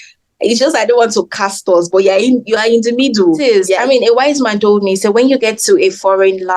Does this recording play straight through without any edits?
no; 1 cut; at 3.4 s

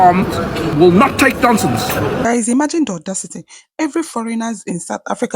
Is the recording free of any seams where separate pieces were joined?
no; 2 cuts; at 0.7 s, 2.3 s

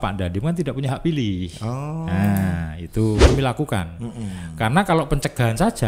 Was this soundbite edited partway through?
yes; 1 cut; at 3.3 s

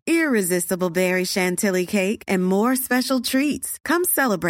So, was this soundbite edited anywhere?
no; 0 cuts

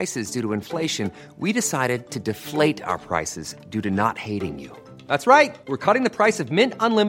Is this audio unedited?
yes; 0 cuts

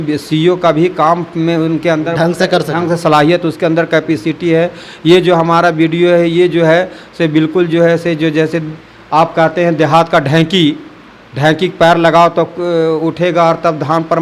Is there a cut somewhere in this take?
no; 0 cuts

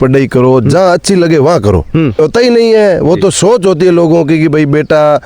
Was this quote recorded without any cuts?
no; 1 cut; at 2.2 s

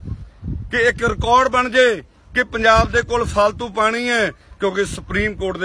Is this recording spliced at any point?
yes; 1 cut; at 4.4 s

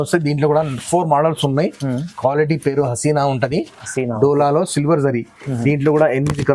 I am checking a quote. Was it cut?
no; 0 cuts

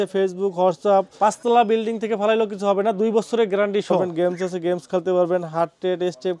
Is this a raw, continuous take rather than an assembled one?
no; 2 cuts; at 1.2 s, 4.0 s

